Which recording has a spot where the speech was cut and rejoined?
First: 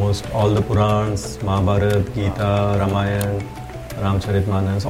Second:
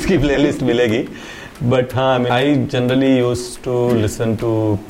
second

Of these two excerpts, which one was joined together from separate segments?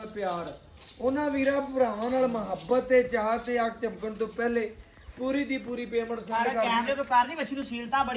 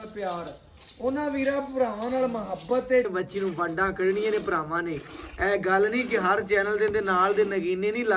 second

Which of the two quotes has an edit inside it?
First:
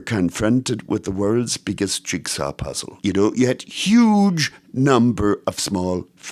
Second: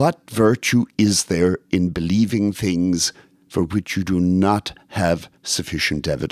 first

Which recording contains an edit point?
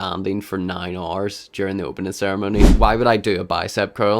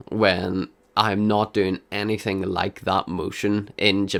first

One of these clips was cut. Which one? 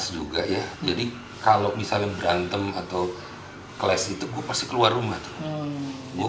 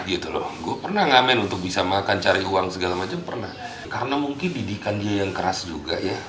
second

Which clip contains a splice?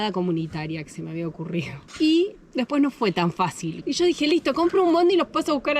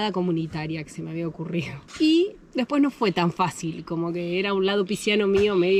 first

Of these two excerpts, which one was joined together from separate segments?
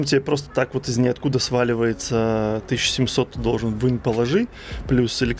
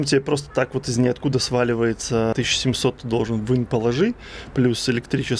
second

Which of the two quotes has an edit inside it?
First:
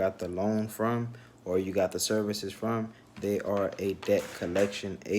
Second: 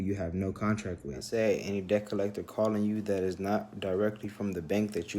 second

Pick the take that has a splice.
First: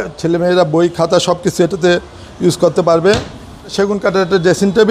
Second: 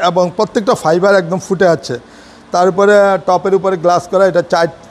first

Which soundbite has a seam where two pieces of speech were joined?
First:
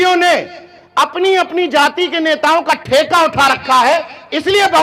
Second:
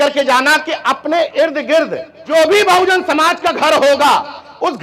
second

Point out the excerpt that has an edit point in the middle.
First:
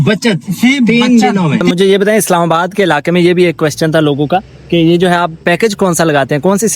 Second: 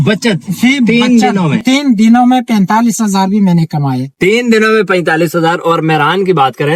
first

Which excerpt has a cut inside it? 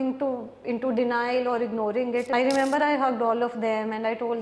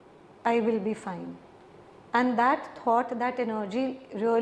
first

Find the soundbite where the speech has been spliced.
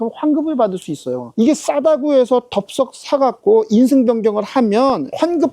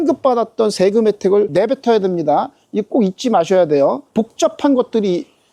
first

